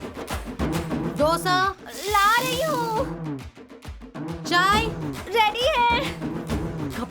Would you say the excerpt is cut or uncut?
cut